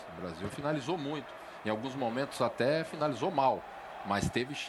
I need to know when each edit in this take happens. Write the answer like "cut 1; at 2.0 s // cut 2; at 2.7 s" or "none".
none